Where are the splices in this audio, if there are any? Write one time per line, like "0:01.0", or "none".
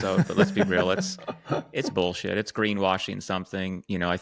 none